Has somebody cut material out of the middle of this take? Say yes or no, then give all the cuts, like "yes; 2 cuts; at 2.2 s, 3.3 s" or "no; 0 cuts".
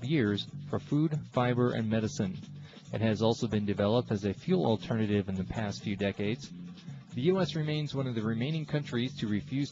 yes; 1 cut; at 8.8 s